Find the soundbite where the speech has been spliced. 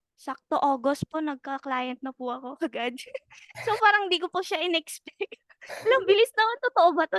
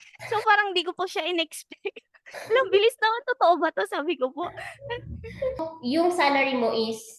second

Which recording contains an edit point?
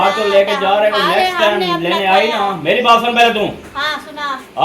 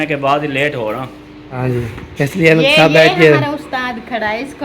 second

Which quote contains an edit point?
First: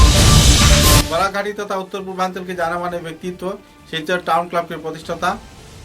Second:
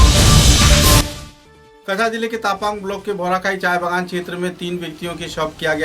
second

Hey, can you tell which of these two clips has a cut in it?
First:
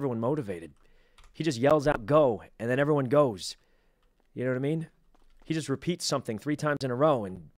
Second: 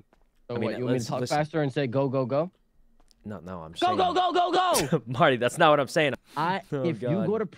second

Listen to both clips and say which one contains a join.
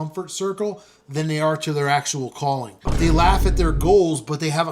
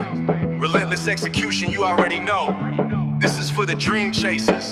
first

